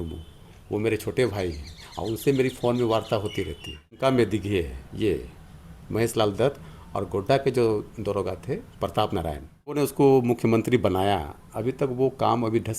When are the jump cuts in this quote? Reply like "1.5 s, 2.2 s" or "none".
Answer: 4.0 s, 9.8 s